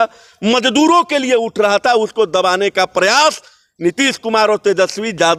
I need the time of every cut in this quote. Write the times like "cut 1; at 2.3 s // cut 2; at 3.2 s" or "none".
none